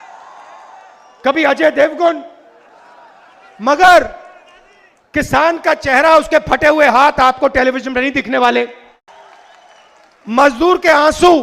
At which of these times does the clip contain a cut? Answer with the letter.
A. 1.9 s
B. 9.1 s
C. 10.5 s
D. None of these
B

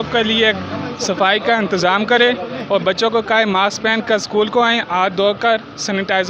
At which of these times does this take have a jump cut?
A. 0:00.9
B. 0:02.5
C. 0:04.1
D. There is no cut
D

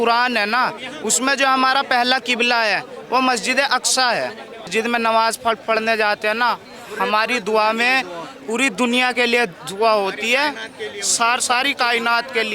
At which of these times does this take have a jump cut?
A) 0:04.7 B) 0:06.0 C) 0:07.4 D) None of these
A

